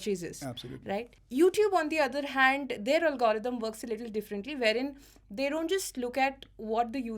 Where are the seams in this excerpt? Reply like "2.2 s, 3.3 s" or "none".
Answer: 1.2 s